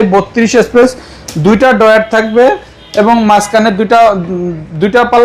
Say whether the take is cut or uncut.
uncut